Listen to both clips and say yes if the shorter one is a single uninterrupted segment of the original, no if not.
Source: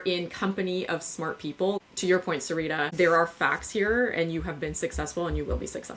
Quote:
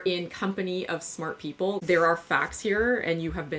no